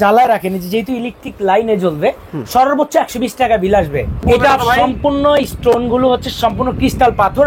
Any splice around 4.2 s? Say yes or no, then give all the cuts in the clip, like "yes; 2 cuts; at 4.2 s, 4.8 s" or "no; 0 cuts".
yes; 1 cut; at 4.2 s